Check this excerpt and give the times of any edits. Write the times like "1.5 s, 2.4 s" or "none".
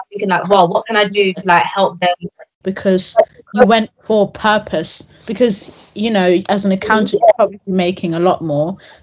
2.6 s